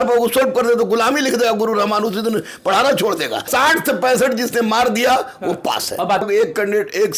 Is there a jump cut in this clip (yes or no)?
yes